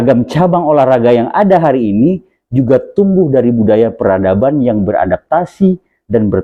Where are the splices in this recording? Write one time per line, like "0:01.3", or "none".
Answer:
none